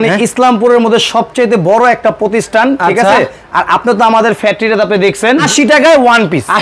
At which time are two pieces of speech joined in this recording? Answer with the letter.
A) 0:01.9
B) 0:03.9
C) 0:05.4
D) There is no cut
C